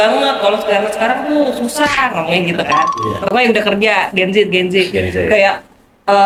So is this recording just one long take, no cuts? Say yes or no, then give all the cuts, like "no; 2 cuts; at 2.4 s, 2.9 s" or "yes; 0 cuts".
yes; 0 cuts